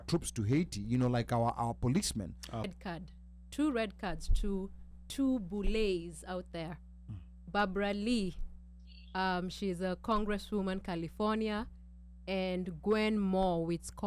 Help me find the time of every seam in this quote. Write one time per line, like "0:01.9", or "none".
0:02.7